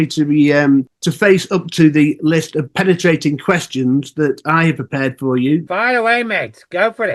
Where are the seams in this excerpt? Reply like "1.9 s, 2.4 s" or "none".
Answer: 1.0 s, 5.7 s